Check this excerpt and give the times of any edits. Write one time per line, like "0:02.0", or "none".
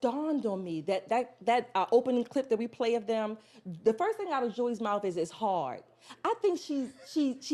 none